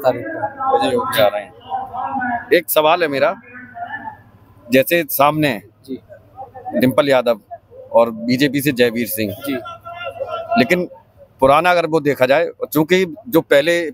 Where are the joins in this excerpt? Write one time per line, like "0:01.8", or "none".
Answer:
none